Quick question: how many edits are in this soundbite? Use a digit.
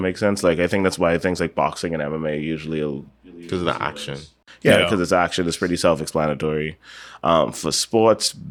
0